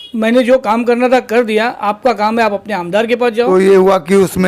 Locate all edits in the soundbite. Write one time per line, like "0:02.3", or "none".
0:03.5